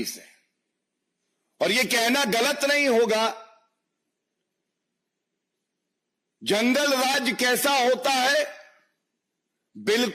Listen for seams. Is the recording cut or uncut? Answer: uncut